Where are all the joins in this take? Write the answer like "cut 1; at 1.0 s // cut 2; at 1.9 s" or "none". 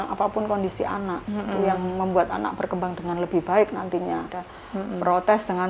cut 1; at 4.2 s